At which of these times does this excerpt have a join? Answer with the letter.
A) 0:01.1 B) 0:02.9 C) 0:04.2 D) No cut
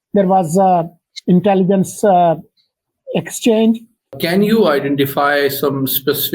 C